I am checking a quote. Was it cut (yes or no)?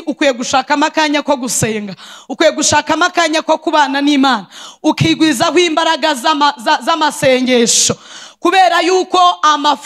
no